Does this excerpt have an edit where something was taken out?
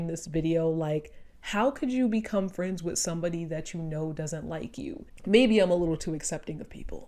yes; 1 cut; at 5.0 s

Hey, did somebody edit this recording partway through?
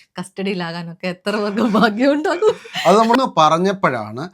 yes; 1 cut; at 3.2 s

